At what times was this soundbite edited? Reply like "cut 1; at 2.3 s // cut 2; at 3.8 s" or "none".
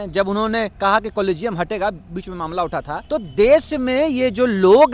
cut 1; at 3.0 s